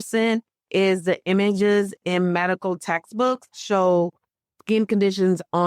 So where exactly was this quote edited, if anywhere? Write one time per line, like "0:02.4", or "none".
0:03.6